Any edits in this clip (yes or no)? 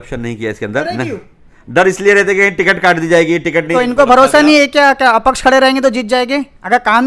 yes